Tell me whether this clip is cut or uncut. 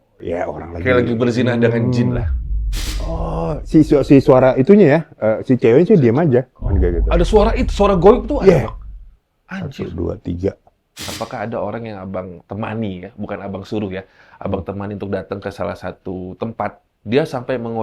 cut